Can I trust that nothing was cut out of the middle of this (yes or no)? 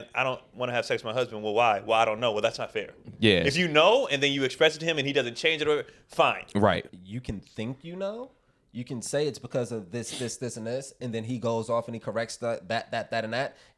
no